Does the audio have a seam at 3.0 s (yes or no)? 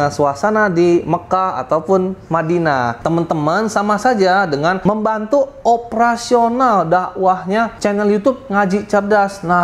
yes